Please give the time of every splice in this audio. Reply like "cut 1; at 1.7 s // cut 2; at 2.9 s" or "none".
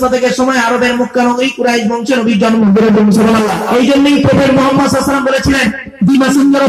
cut 1; at 3.6 s